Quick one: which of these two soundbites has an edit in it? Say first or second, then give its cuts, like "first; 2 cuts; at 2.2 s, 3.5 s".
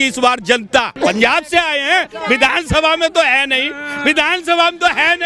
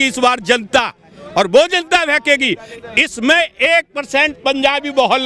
first; 1 cut; at 1.0 s